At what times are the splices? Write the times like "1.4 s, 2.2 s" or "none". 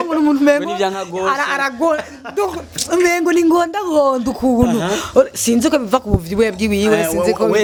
none